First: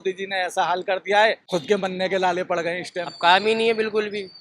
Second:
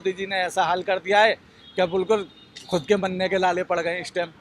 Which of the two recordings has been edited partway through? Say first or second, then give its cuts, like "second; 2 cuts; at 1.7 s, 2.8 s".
first; 2 cuts; at 1.4 s, 3.1 s